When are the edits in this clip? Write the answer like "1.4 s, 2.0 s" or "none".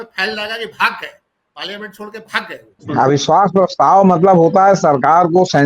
2.8 s